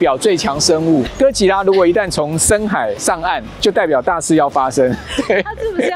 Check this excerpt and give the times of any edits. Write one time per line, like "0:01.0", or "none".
none

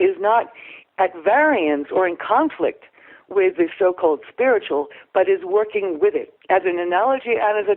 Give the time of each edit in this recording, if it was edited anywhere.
0:06.3

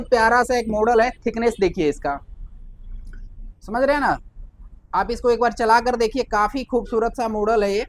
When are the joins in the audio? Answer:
none

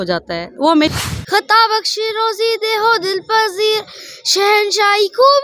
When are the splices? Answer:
0:00.9

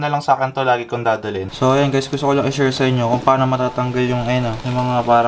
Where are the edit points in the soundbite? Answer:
0:01.5

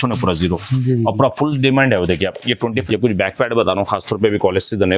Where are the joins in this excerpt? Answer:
0:02.8

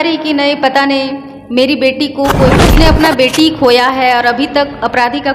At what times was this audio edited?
0:02.6

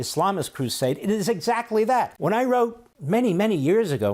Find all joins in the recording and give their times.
0:02.1
0:02.9

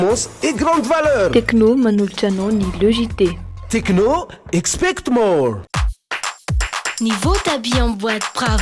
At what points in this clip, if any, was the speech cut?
0:05.7

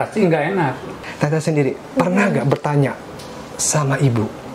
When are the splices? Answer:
0:01.0

